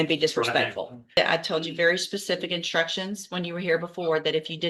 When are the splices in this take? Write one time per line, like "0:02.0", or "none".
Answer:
0:01.2